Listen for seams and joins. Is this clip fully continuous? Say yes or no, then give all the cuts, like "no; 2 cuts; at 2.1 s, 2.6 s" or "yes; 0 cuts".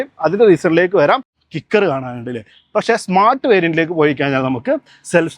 no; 1 cut; at 1.4 s